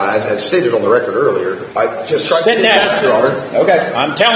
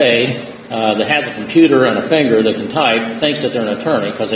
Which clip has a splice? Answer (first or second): first